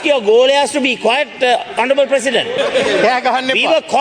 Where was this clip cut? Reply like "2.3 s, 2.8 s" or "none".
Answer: 2.5 s